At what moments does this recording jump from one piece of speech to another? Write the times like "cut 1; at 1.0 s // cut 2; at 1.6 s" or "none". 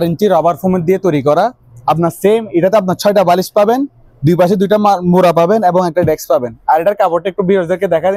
none